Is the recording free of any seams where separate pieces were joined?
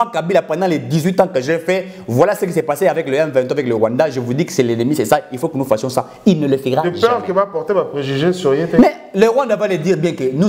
yes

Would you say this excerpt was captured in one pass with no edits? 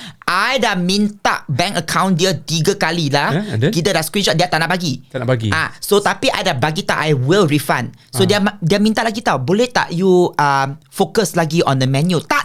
yes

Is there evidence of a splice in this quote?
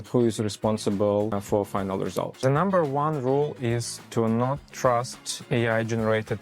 yes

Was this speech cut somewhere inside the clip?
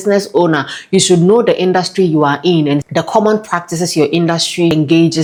no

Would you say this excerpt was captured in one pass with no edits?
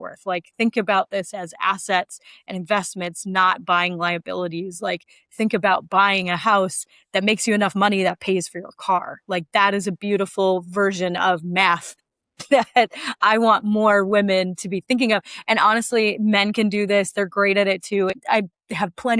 no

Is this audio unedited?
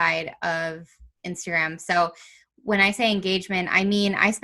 yes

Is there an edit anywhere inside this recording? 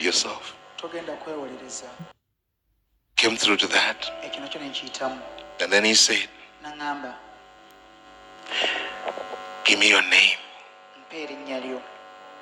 yes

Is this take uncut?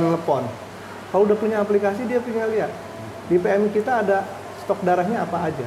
yes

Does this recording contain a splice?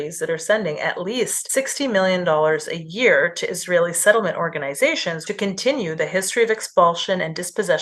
yes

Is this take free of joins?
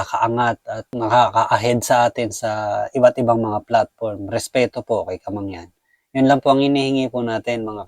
yes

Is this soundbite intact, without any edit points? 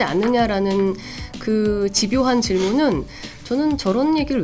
yes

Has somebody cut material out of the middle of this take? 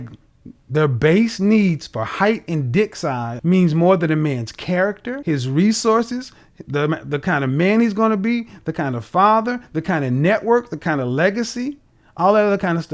yes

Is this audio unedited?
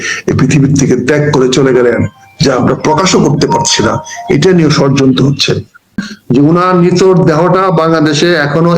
no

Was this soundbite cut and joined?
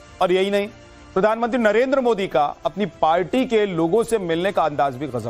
yes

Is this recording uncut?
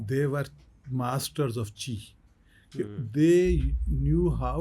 yes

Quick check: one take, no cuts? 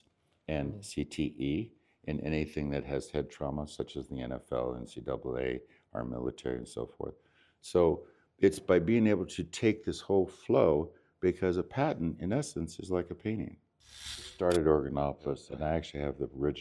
no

